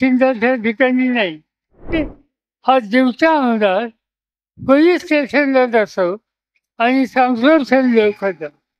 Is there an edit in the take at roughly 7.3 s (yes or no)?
no